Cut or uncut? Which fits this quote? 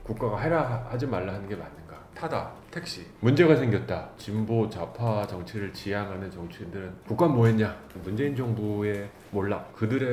cut